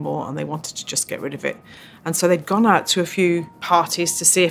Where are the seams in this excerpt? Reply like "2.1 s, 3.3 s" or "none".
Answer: 3.5 s